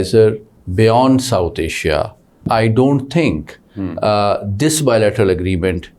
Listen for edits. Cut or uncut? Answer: cut